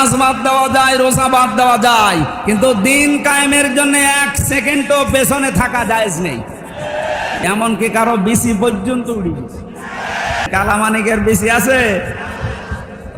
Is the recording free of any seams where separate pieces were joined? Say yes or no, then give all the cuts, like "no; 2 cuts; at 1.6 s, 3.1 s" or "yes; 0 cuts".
no; 2 cuts; at 7.4 s, 10.5 s